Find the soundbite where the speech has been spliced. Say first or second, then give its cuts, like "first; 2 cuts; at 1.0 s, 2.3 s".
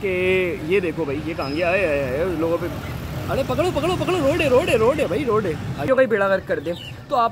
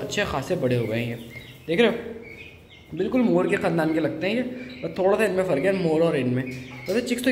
first; 1 cut; at 5.8 s